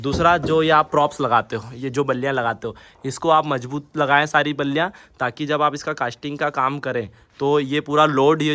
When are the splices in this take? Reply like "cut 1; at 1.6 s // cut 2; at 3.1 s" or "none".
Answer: none